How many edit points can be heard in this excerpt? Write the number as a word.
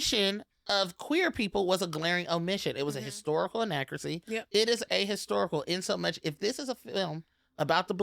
zero